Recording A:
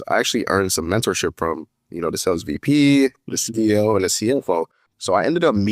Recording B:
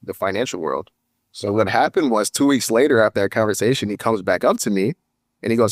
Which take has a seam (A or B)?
A